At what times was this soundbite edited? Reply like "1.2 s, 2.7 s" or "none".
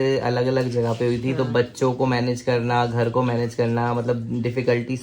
none